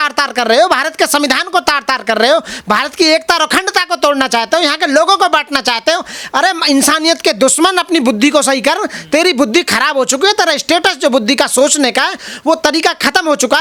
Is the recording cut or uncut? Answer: uncut